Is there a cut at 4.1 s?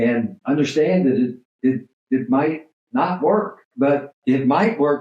yes; 1 cut; at 4.1 s

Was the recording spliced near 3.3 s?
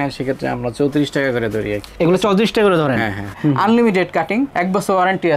yes; 1 cut; at 3.3 s

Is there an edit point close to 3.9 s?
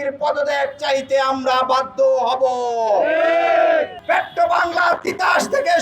yes; 1 cut; at 3.9 s

